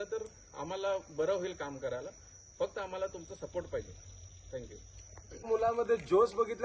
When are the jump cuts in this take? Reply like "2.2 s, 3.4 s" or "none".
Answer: 5.5 s